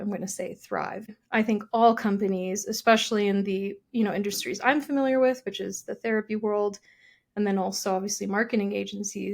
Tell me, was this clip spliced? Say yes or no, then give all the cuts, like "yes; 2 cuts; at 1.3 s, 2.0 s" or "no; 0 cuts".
yes; 1 cut; at 1.2 s